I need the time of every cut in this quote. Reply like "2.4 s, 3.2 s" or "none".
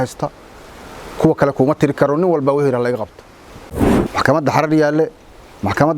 3.9 s